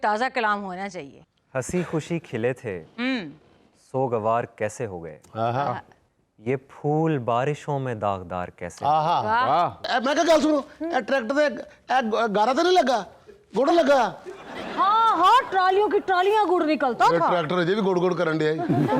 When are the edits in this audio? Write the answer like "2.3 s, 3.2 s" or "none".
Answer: 1.2 s, 9.8 s

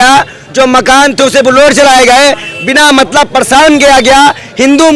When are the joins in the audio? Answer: none

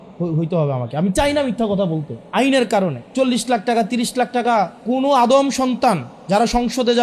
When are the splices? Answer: 2.2 s, 3.0 s, 4.8 s

